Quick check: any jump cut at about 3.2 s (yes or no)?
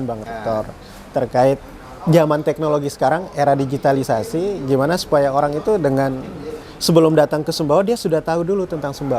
no